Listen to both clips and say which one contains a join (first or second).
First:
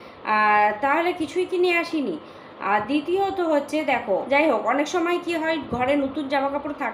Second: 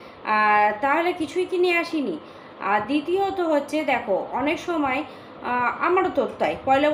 first